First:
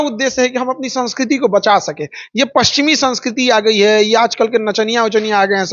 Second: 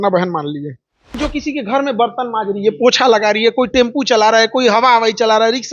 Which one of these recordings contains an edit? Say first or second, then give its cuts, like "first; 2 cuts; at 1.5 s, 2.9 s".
second; 1 cut; at 1.2 s